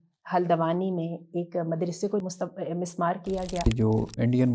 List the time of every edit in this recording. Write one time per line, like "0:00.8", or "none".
0:02.2
0:03.7